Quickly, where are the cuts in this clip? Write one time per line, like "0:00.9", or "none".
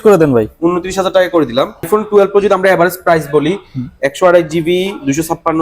0:01.9